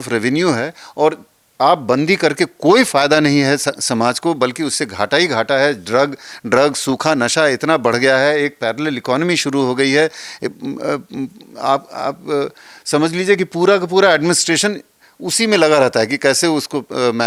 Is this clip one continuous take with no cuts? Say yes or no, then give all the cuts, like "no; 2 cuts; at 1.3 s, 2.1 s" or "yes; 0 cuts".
yes; 0 cuts